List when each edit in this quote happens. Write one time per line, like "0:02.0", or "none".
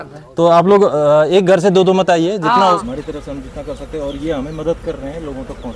0:02.6